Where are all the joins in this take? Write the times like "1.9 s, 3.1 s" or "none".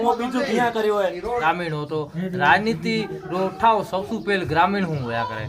1.4 s

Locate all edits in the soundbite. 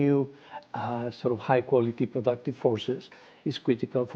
none

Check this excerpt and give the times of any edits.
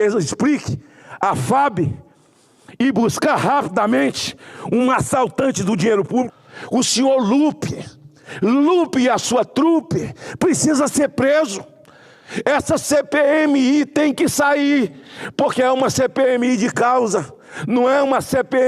6.3 s

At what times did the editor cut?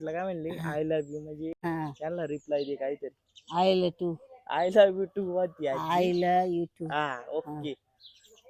1.6 s

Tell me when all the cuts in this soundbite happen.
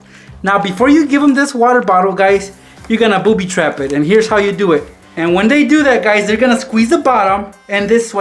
5.1 s

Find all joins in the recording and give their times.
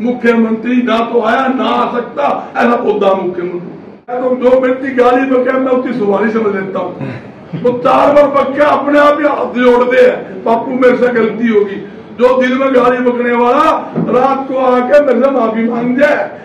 4.2 s

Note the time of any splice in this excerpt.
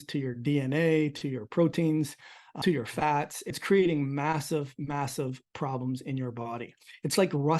2.5 s, 3.6 s

